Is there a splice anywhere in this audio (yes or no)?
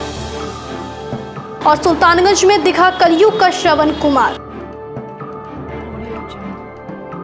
no